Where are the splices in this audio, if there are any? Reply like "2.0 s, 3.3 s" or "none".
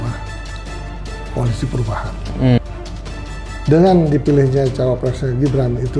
2.6 s